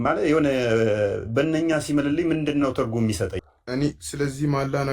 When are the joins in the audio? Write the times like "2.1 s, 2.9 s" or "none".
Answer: 3.5 s